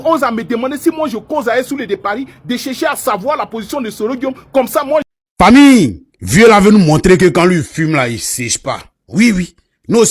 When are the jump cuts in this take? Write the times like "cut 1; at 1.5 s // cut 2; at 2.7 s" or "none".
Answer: cut 1; at 5.1 s